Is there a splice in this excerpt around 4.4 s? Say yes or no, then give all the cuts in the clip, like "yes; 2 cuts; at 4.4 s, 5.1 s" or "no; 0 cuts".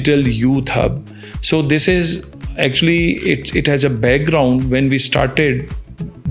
no; 0 cuts